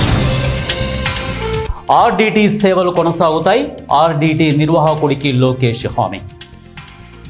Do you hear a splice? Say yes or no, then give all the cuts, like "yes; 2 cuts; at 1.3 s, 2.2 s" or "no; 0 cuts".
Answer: yes; 2 cuts; at 1.7 s, 6.2 s